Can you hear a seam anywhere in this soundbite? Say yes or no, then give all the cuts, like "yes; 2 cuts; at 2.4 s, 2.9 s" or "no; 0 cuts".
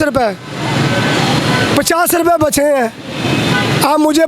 no; 0 cuts